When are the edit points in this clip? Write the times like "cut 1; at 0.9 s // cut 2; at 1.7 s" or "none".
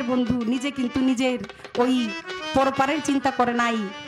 none